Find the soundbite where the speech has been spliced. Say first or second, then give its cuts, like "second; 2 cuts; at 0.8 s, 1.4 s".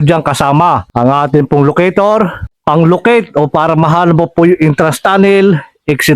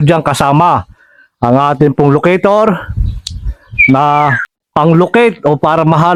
first; 2 cuts; at 0.9 s, 2.5 s